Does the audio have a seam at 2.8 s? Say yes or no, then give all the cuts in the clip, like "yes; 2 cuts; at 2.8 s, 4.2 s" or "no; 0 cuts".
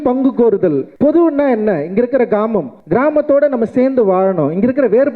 yes; 2 cuts; at 0.9 s, 2.8 s